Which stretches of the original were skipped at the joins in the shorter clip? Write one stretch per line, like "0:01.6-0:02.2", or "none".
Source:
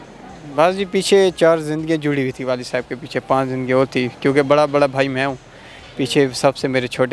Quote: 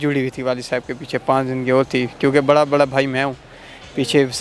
none